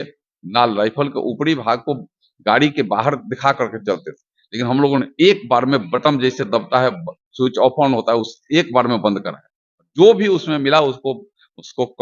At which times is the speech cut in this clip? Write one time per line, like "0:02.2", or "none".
none